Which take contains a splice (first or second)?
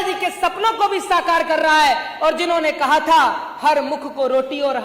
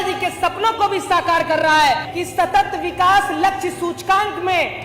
second